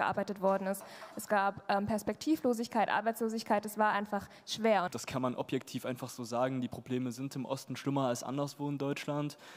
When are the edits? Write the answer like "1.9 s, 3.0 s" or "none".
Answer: 4.9 s

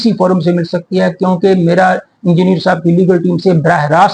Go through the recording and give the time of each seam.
none

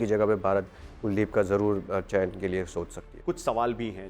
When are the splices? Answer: 3.1 s

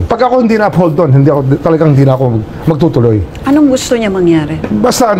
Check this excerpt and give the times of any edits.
none

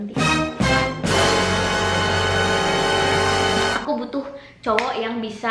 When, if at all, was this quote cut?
3.8 s

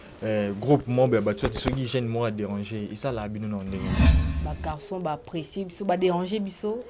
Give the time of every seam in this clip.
4.2 s

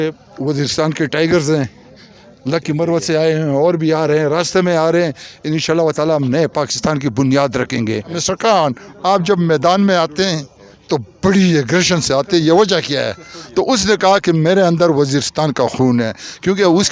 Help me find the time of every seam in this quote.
8.2 s

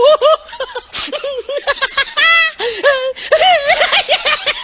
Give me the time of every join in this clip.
2.9 s

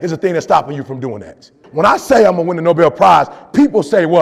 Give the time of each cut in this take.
1.6 s

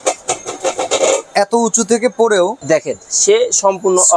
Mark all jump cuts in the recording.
2.6 s

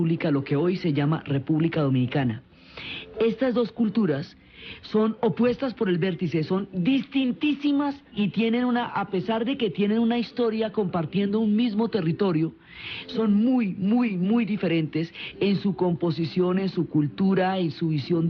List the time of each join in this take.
5.3 s

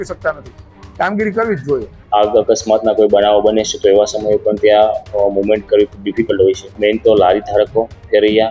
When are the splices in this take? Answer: 1.9 s, 6.7 s

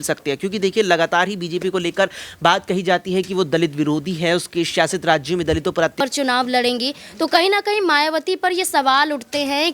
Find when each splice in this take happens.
5.9 s

